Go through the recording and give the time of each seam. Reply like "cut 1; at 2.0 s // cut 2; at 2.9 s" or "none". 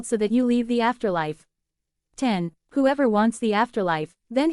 cut 1; at 2.3 s